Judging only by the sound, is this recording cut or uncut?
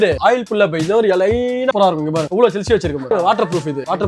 cut